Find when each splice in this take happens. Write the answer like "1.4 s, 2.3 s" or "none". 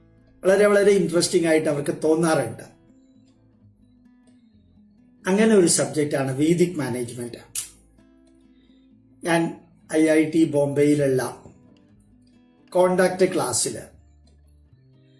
3.3 s, 5.2 s